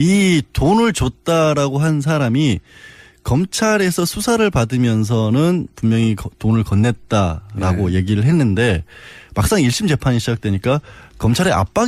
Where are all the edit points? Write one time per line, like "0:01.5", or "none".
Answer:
0:06.3